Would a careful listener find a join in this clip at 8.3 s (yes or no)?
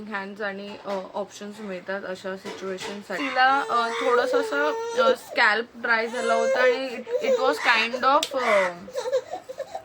no